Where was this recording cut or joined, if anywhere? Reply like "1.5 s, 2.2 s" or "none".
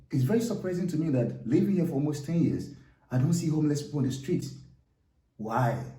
none